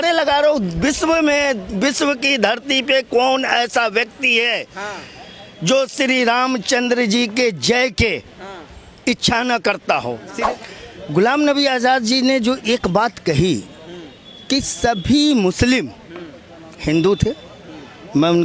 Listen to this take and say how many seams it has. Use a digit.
1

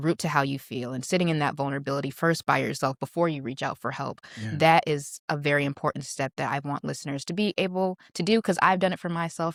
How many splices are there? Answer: 0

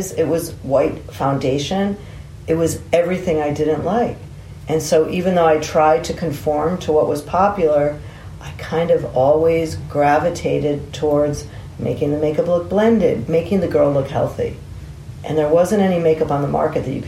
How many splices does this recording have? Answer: 1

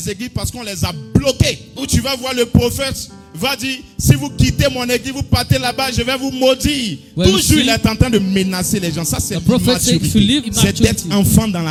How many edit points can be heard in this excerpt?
0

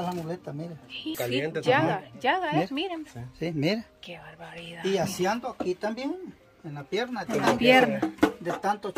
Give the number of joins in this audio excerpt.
1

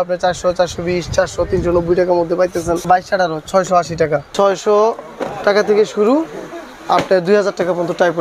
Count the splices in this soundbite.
2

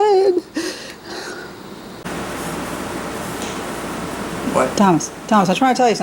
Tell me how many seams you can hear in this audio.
1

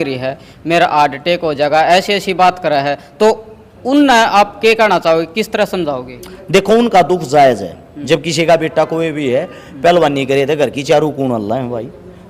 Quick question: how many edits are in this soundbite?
0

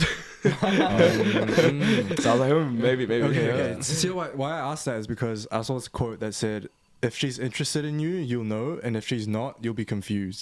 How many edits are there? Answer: 0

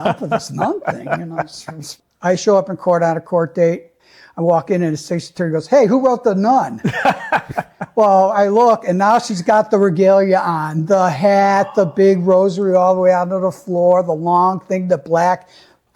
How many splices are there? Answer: 2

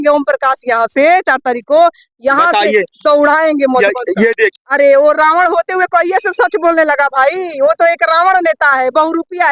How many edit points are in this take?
1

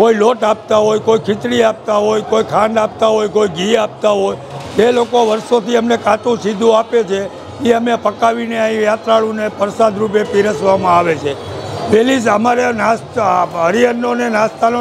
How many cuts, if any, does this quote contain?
0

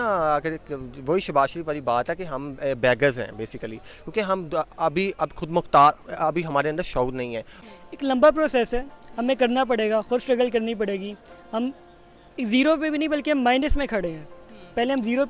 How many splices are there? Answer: 1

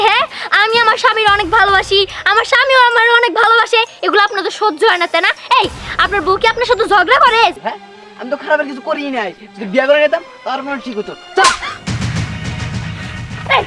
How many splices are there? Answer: 1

